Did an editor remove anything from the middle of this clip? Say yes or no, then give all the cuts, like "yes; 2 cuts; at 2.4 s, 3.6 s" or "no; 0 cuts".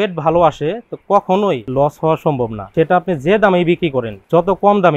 no; 0 cuts